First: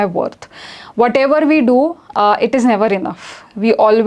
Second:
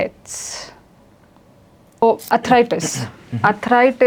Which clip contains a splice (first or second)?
second